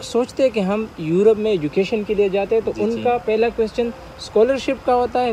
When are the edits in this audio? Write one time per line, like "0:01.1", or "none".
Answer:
none